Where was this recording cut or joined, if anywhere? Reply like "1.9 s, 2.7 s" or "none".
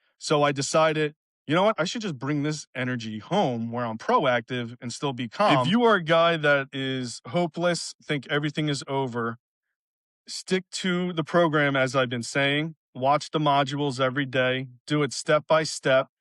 5.7 s